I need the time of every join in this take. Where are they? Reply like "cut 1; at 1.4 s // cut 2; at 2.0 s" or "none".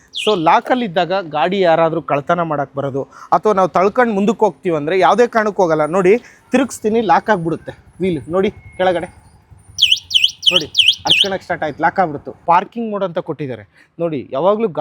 cut 1; at 12.4 s